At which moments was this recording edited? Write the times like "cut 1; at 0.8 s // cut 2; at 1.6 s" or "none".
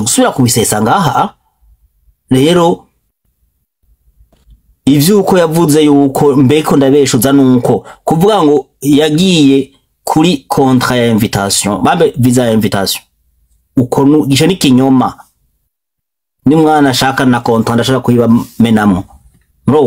none